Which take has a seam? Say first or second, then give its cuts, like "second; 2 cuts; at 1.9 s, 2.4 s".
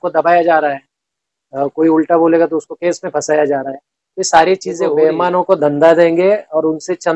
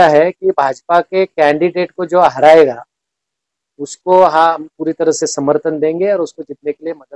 first; 1 cut; at 4.8 s